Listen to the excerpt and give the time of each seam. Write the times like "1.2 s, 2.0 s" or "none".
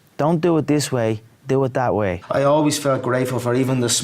2.2 s